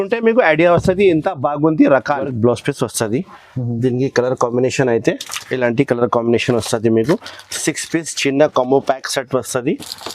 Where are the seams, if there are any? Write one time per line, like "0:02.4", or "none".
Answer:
0:02.3